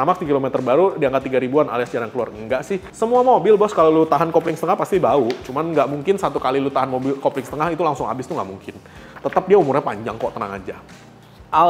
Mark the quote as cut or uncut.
uncut